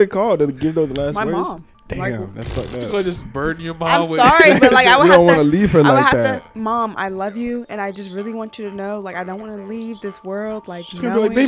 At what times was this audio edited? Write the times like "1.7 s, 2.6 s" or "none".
none